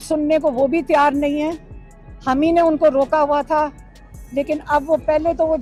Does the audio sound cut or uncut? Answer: uncut